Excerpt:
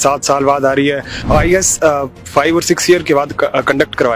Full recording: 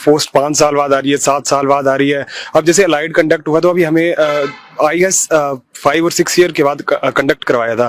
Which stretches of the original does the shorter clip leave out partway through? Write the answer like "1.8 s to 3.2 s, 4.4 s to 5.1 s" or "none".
2.3 s to 4.6 s